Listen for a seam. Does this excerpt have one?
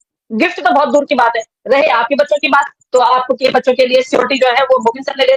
no; 0 cuts

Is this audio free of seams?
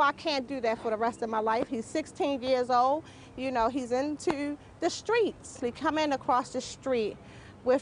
yes; 0 cuts

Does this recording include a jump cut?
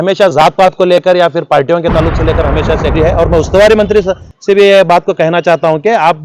yes; 1 cut; at 2.9 s

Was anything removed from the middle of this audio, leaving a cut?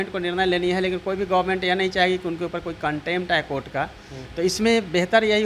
no; 0 cuts

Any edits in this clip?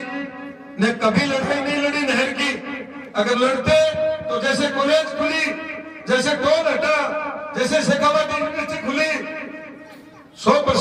no; 0 cuts

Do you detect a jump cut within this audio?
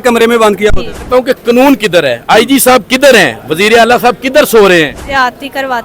yes; 2 cuts; at 1.1 s, 5.0 s

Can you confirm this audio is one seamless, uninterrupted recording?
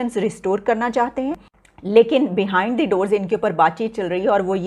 no; 1 cut; at 1.5 s

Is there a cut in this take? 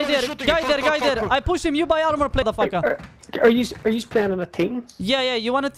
yes; 1 cut; at 2.4 s

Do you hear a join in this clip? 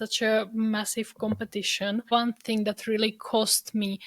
yes; 1 cut; at 2.1 s

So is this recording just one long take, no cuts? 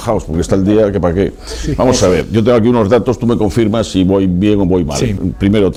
yes; 0 cuts

